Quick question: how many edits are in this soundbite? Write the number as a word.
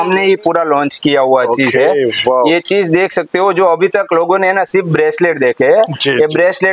zero